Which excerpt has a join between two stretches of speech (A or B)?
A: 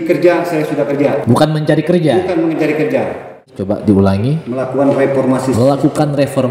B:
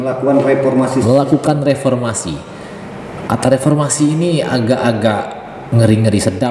A